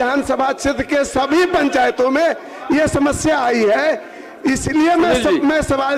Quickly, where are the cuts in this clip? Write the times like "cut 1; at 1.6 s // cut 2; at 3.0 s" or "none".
none